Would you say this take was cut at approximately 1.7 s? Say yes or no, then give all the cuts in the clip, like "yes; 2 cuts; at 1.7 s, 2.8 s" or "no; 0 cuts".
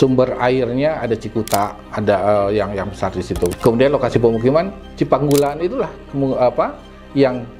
no; 1 cut; at 3.6 s